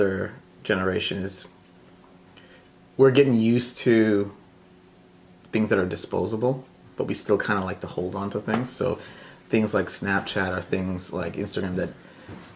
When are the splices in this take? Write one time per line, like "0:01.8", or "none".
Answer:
none